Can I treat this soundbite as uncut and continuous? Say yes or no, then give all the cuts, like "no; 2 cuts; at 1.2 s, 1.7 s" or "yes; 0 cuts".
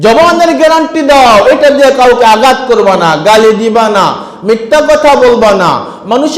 yes; 0 cuts